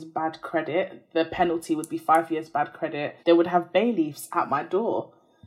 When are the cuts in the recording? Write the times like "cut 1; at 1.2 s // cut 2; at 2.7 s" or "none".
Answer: cut 1; at 3.1 s